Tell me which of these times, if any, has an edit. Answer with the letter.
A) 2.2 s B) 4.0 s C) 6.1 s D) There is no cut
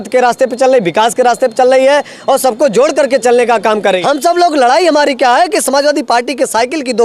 B